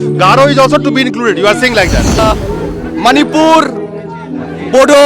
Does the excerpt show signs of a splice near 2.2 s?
yes; 1 cut; at 2.2 s

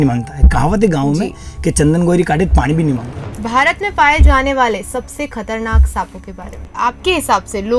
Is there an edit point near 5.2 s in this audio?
no; 2 cuts; at 3.3 s, 6.6 s

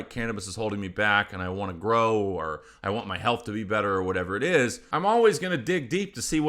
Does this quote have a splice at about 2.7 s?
no; 1 cut; at 4.8 s

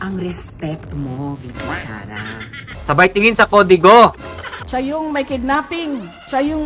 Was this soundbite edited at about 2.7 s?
yes; 2 cuts; at 2.7 s, 4.6 s

